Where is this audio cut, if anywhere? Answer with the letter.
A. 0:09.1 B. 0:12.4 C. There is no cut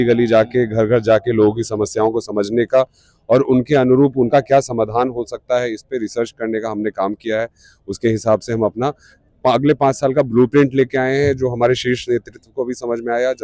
C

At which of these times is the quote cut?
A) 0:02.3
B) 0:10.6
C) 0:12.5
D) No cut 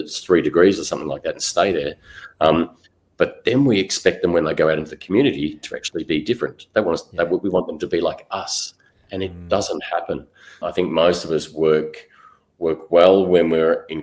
B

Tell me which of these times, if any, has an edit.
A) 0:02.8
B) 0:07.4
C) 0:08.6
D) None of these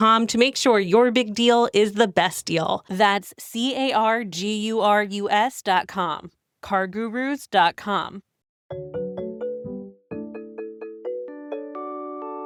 D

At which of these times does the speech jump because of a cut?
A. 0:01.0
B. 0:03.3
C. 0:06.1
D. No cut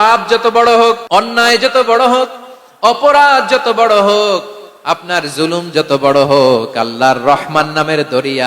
A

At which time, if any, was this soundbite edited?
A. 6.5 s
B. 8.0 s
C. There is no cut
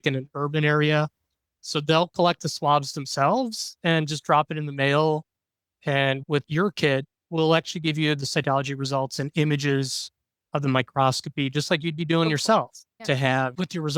A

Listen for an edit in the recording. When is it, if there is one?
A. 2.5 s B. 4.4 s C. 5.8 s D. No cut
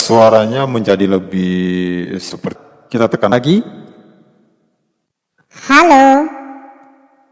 A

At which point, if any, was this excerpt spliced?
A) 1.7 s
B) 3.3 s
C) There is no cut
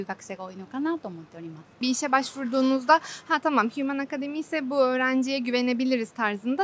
A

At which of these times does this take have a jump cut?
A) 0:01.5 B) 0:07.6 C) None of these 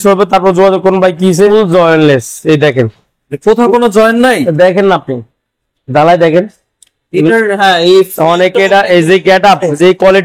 A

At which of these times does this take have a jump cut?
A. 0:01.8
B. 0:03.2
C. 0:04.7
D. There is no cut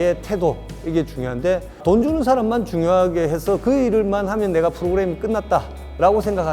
A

